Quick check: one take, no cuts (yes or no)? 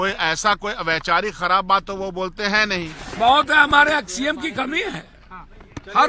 no